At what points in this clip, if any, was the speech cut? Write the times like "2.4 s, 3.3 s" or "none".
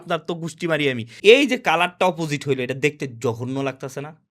1.1 s